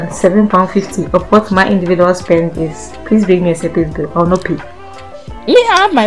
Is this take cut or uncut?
cut